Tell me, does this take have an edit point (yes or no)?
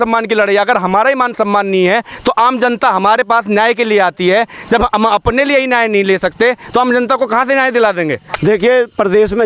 yes